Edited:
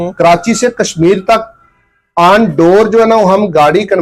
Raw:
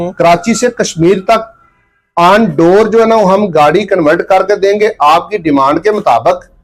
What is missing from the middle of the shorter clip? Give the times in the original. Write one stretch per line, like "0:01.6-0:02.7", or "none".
none